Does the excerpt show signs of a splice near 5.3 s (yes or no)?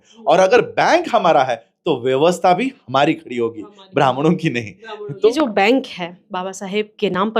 yes